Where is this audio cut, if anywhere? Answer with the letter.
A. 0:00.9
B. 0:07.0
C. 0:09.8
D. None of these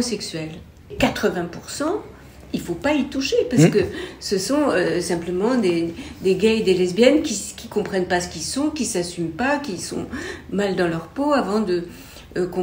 A